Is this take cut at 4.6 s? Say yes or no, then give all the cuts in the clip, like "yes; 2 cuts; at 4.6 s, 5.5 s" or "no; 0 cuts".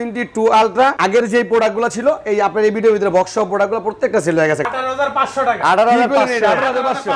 yes; 2 cuts; at 1.0 s, 4.6 s